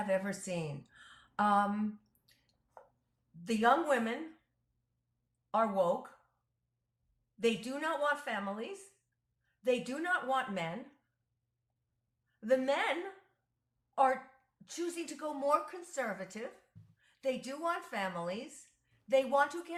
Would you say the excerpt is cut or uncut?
uncut